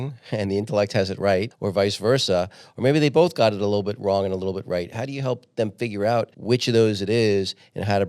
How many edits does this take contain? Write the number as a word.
two